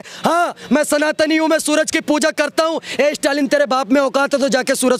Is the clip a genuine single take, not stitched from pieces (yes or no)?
yes